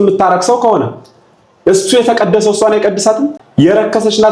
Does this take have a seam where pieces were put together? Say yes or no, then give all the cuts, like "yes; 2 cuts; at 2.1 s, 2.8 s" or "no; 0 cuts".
yes; 1 cut; at 3.4 s